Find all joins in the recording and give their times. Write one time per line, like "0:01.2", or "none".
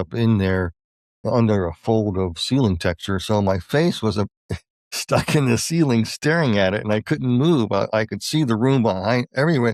none